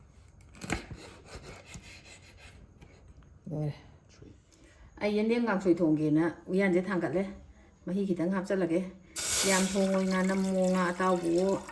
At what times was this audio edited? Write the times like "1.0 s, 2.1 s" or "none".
none